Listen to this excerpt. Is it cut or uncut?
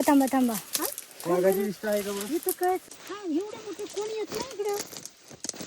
cut